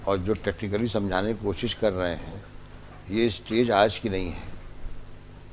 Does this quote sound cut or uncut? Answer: uncut